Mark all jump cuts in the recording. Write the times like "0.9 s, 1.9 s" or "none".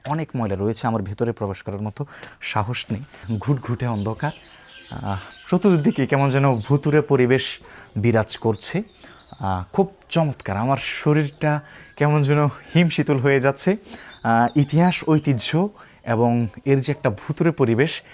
3.2 s